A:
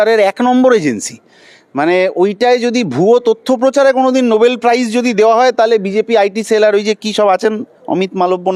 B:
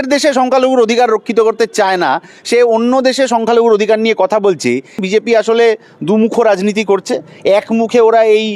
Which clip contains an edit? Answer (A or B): B